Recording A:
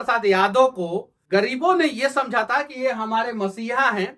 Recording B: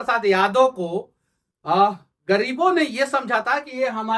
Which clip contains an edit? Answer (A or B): A